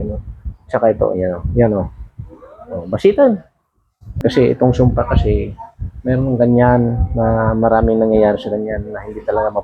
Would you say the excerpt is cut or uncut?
cut